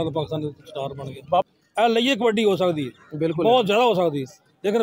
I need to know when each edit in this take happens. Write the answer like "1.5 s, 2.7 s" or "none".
1.4 s